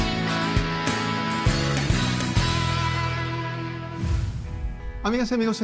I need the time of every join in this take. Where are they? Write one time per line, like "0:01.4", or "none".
0:02.9